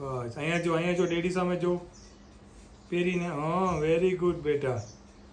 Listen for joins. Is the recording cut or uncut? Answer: uncut